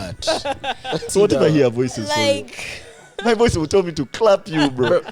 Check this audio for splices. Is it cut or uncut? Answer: cut